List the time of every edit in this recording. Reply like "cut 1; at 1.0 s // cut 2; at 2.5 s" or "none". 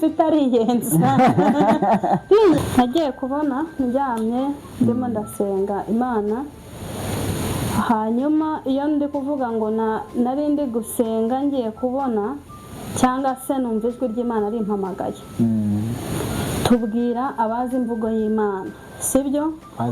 cut 1; at 2.6 s